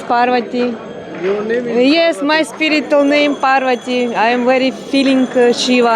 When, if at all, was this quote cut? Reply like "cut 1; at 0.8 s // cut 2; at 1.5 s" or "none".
none

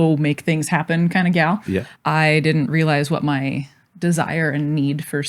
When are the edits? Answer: cut 1; at 1.9 s

